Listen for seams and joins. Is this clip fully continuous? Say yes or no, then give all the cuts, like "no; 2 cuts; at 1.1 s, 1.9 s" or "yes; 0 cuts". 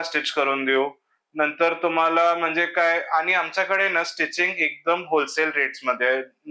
yes; 0 cuts